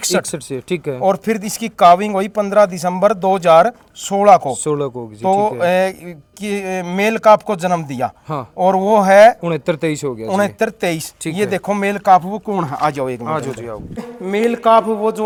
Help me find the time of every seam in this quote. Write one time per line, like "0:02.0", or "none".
none